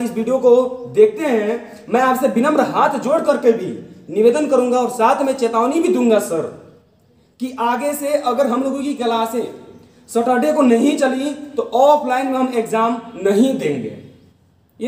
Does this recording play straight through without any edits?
yes; 0 cuts

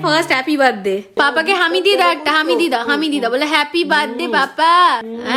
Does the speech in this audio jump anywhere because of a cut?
no; 0 cuts

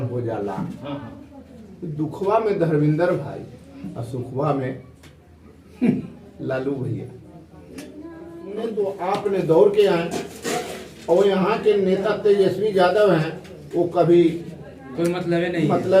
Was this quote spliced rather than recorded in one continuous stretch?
yes; 1 cut; at 8.7 s

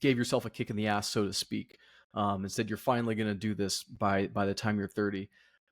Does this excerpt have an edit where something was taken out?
no; 0 cuts

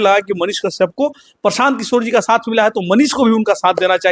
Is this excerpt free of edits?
yes; 0 cuts

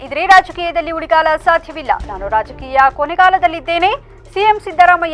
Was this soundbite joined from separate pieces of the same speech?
no; 0 cuts

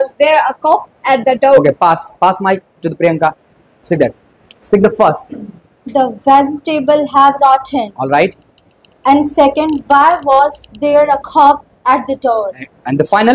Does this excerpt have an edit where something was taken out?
no; 0 cuts

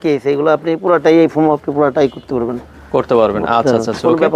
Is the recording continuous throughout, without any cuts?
yes; 0 cuts

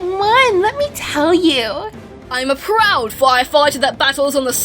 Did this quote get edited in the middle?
yes; 1 cut; at 1.9 s

